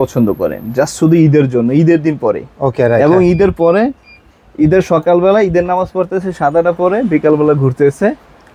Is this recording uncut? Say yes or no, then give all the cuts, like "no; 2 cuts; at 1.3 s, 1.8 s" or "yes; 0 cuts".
yes; 0 cuts